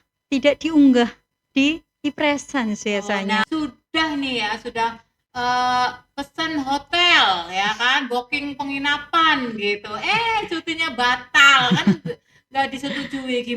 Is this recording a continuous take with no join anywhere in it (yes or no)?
no